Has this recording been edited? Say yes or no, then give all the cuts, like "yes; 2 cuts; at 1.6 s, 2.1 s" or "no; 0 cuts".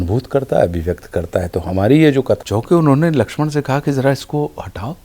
yes; 1 cut; at 2.4 s